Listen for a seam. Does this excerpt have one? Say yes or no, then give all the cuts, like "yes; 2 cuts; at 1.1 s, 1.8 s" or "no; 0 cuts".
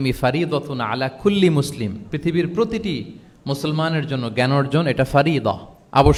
no; 0 cuts